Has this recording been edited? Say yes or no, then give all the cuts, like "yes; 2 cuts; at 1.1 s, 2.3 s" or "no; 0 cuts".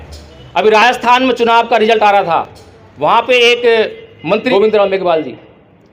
yes; 1 cut; at 4.5 s